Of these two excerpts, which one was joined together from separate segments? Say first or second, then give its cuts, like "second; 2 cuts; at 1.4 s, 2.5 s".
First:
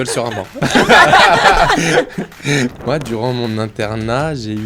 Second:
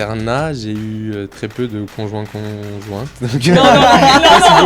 first; 1 cut; at 2.8 s